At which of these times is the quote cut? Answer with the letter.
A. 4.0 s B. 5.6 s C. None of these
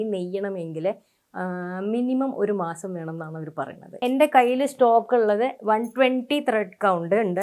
A